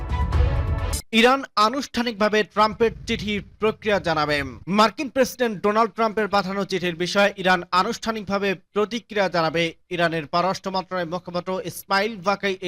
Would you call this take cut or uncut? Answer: cut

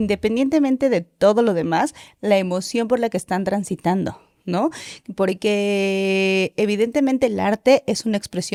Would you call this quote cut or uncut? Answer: uncut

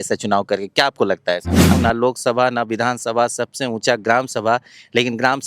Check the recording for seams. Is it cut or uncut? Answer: cut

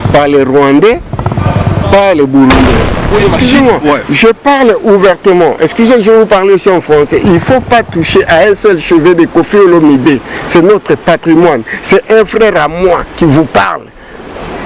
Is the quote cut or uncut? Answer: cut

